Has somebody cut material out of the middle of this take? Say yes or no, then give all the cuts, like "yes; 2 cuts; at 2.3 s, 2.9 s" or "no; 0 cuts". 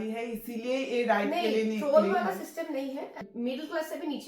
yes; 1 cut; at 3.2 s